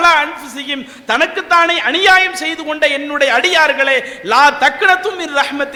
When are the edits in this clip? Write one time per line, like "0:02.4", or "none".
none